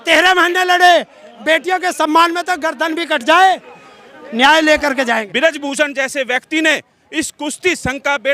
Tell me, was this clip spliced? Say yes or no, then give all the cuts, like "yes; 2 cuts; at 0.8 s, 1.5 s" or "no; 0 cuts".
yes; 1 cut; at 5.3 s